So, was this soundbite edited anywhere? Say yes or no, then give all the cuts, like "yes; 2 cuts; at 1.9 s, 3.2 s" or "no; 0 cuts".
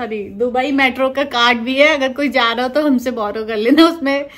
no; 0 cuts